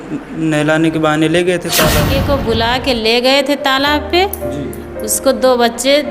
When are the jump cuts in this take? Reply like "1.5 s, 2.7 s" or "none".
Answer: 2.0 s